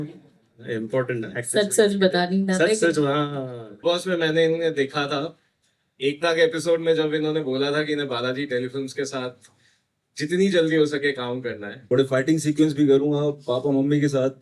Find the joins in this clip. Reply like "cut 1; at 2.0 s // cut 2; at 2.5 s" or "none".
cut 1; at 3.6 s // cut 2; at 11.7 s